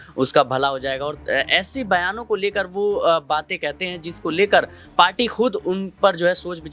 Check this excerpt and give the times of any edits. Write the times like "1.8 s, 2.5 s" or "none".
none